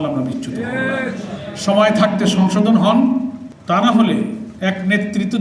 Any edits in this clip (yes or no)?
yes